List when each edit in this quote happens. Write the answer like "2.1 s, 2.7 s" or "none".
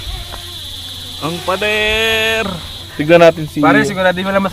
2.9 s